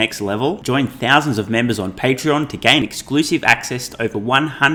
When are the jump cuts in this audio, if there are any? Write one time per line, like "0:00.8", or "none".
none

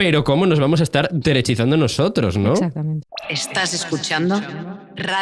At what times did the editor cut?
0:03.0

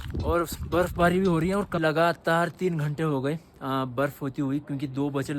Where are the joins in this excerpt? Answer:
0:01.8

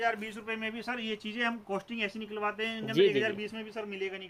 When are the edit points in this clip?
none

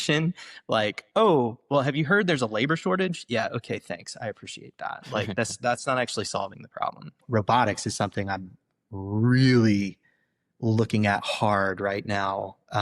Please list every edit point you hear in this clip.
0:07.2

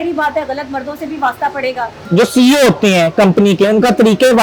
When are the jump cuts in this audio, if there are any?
0:02.0

